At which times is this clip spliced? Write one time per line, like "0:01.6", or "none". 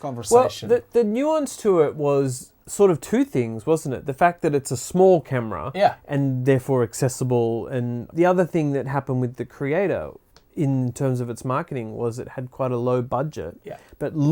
0:08.0